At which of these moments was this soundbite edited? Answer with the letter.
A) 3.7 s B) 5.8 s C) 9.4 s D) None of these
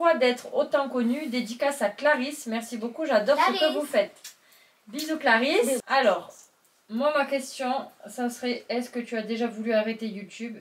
B